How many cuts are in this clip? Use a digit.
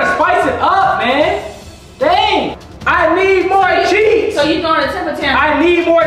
1